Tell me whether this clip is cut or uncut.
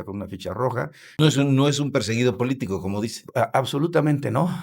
cut